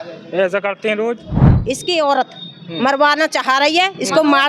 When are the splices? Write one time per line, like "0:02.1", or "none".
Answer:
0:01.5